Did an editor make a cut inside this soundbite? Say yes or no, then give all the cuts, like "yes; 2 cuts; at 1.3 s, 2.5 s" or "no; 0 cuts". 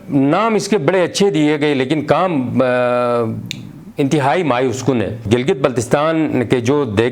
yes; 1 cut; at 5.2 s